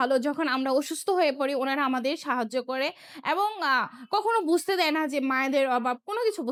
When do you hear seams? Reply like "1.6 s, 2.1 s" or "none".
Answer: none